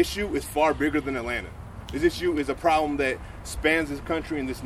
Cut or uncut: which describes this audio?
uncut